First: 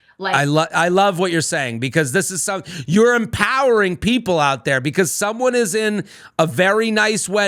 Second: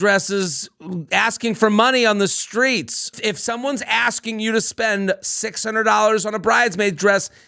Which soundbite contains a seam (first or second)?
second